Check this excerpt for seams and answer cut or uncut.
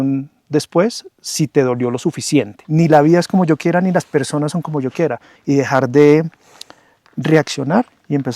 cut